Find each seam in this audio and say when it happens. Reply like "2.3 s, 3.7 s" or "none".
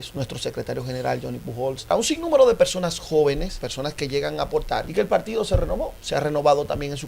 1.9 s, 3.6 s, 4.9 s